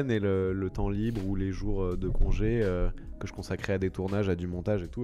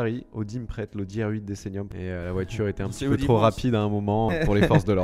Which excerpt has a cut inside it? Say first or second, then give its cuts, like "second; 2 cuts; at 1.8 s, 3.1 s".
second; 2 cuts; at 2.0 s, 4.3 s